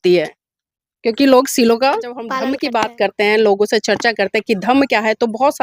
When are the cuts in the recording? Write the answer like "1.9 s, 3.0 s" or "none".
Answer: 2.3 s